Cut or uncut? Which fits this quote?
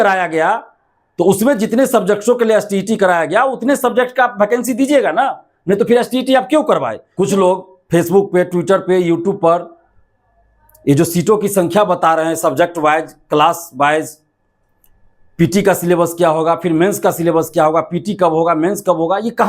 cut